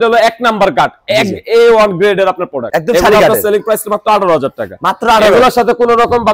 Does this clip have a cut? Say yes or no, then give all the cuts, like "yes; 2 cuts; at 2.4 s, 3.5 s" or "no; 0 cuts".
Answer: no; 0 cuts